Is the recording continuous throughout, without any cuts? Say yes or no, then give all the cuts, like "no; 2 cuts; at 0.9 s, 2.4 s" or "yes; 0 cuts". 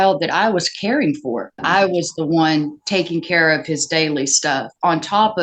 no; 1 cut; at 1.6 s